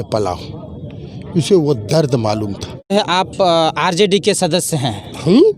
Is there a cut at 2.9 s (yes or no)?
yes